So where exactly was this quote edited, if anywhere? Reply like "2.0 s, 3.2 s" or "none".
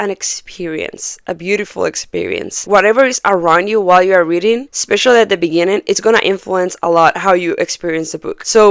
none